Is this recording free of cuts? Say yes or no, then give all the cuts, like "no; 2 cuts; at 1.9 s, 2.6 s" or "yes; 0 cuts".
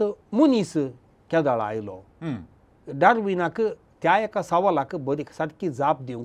yes; 0 cuts